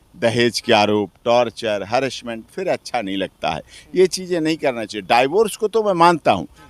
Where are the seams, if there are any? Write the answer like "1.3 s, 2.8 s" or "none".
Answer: none